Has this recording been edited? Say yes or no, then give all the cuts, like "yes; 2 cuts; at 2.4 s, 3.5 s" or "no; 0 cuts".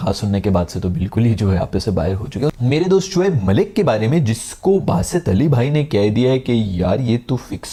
no; 0 cuts